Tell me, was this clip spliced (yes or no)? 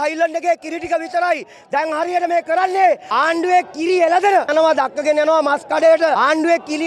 yes